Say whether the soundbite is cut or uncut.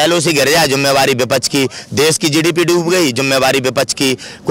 uncut